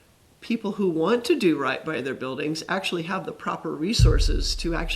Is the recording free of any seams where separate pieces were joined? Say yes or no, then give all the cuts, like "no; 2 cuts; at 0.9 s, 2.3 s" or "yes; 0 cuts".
yes; 0 cuts